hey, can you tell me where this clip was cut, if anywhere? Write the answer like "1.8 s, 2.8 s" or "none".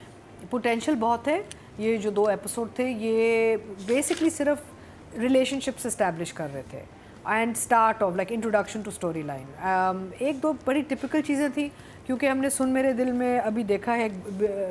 none